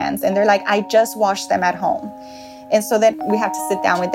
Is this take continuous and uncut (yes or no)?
no